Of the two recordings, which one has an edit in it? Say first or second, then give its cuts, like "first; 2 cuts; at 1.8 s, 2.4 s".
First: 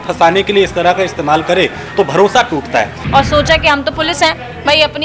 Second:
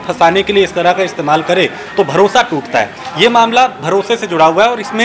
first; 1 cut; at 3.0 s